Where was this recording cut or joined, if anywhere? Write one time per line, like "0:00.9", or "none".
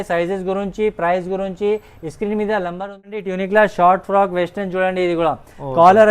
0:03.1